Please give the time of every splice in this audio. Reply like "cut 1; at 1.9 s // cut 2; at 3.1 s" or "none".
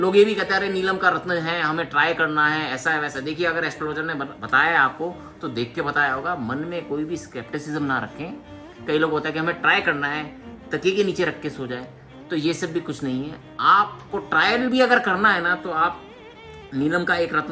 none